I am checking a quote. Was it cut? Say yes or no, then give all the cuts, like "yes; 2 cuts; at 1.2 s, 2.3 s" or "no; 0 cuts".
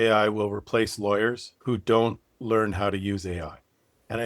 yes; 1 cut; at 1.5 s